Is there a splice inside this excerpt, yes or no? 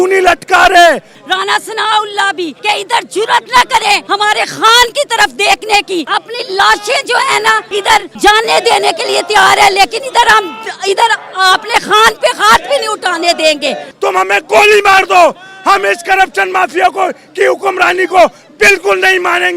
yes